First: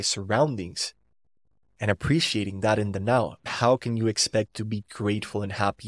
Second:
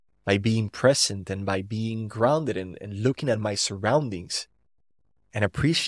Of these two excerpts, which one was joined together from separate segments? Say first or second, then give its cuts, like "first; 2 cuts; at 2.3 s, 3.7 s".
first; 1 cut; at 3.5 s